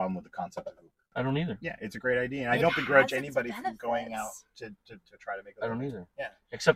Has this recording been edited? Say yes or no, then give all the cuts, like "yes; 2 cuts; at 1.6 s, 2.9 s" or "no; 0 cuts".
yes; 1 cut; at 1.1 s